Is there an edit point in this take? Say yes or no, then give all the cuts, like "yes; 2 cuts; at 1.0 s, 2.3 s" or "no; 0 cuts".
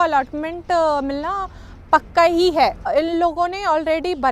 yes; 1 cut; at 2.9 s